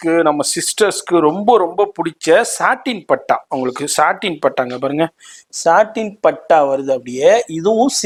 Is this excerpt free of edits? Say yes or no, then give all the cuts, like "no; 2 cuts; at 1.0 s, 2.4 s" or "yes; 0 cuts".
yes; 0 cuts